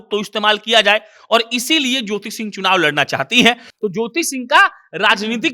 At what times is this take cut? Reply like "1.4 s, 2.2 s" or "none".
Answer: 3.7 s